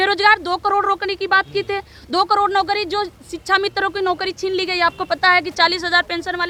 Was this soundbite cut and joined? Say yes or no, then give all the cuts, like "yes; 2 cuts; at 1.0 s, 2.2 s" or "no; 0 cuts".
no; 0 cuts